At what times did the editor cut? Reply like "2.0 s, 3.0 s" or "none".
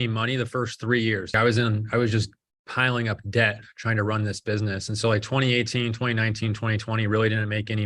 1.3 s